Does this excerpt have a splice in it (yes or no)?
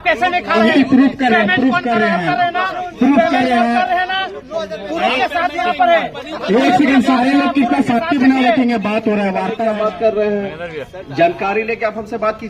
yes